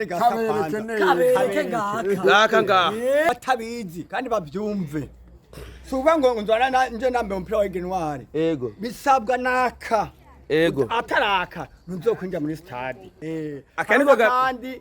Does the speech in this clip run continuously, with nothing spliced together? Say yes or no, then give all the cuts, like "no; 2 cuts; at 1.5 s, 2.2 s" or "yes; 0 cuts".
no; 2 cuts; at 3.3 s, 13.1 s